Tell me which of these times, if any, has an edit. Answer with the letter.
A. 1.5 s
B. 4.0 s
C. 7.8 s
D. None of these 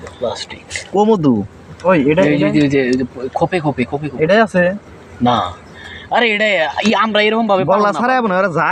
D